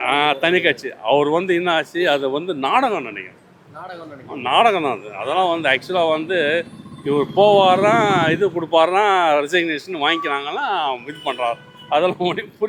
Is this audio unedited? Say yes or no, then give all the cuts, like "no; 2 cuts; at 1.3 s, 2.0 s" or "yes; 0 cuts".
yes; 0 cuts